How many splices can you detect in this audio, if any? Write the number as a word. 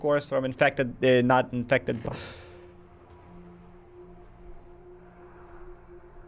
zero